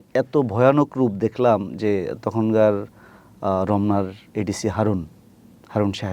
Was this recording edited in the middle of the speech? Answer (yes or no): no